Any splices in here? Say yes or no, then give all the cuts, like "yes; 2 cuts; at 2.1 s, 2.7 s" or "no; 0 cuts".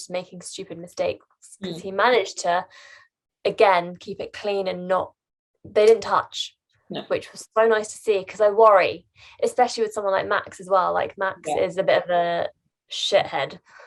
no; 0 cuts